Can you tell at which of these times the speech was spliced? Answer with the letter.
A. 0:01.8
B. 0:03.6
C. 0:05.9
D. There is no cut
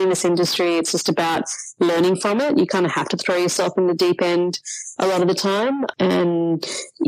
C